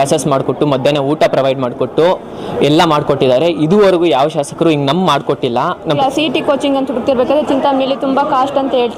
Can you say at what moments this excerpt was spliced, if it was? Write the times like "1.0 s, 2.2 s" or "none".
6.0 s